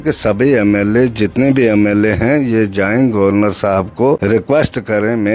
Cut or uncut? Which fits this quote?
cut